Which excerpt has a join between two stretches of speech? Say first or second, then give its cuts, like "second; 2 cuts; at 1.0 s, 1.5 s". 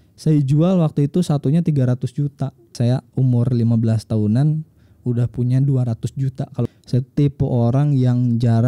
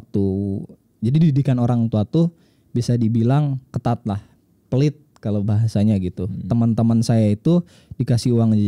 first; 2 cuts; at 2.7 s, 6.7 s